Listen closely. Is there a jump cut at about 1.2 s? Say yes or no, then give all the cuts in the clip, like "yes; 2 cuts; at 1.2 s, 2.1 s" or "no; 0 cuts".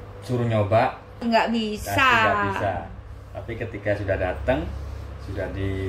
yes; 1 cut; at 1.2 s